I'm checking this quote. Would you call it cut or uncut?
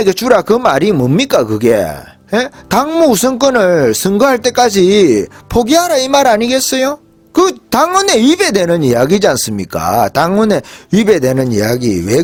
uncut